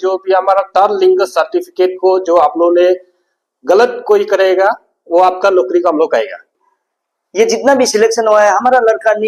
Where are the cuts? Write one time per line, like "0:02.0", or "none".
0:06.6